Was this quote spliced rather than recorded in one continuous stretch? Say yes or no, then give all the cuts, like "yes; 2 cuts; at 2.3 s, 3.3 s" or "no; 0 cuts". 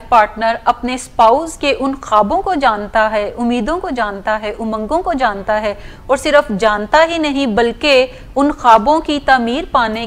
no; 0 cuts